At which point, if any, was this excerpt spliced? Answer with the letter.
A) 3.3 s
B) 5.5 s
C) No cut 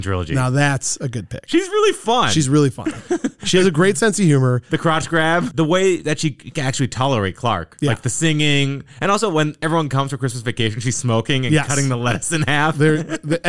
B